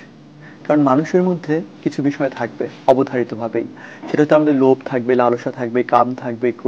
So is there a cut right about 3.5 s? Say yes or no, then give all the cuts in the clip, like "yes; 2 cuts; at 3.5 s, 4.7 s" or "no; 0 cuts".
no; 1 cut; at 1.7 s